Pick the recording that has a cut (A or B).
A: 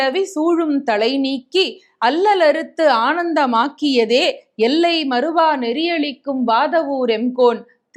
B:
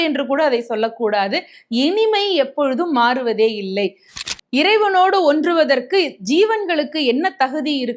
B